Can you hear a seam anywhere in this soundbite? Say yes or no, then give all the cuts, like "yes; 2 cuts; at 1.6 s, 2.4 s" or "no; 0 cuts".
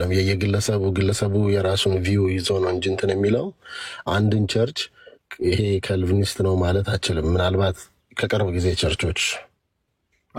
no; 0 cuts